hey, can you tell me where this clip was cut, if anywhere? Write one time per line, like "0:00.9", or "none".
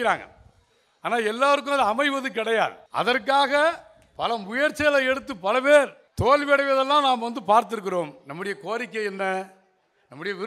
0:02.8
0:06.0